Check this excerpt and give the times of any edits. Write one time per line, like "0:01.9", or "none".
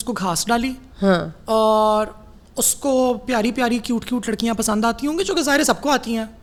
none